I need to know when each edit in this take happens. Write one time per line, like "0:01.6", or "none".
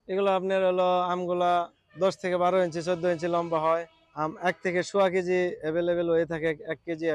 0:01.8
0:04.0